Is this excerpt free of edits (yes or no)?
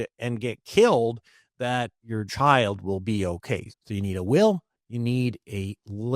no